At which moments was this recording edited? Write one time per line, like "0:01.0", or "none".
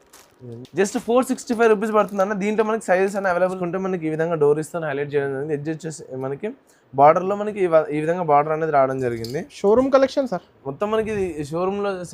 0:03.6

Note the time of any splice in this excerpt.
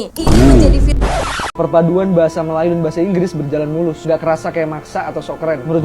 0:01.3

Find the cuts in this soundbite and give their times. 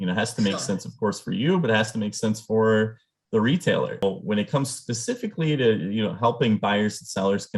0:04.0

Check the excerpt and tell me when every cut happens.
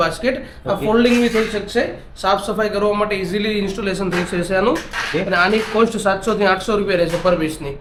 none

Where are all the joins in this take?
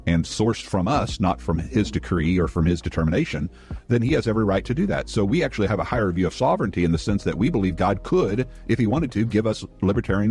0:03.5

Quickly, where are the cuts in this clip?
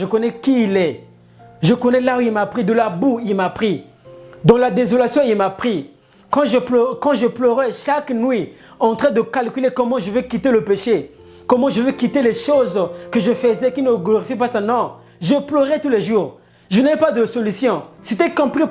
none

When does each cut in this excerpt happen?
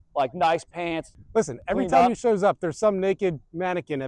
0:01.1

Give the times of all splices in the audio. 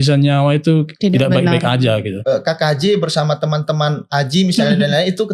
0:00.9
0:02.2

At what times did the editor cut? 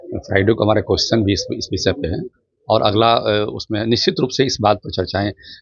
none

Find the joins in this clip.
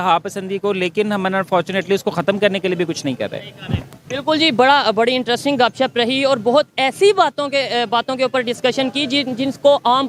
none

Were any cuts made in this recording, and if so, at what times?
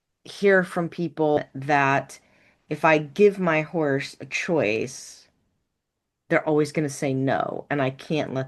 0:01.5

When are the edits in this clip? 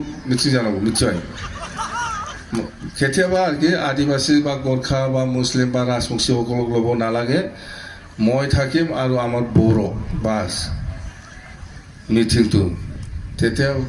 none

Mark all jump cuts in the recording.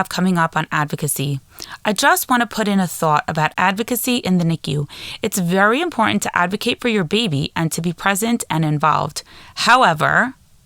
0:03.5

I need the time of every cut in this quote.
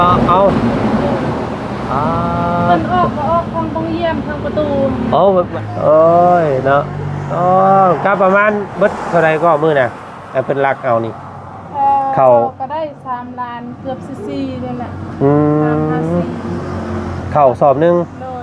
0:05.5

